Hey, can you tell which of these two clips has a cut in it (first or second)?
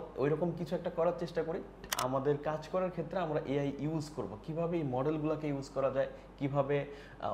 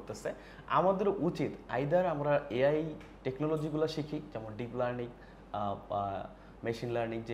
first